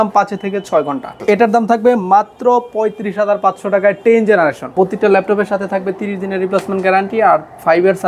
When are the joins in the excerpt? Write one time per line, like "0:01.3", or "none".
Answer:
0:01.1
0:04.7